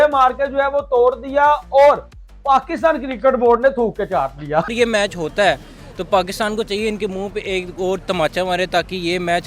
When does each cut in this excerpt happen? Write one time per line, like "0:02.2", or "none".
0:04.7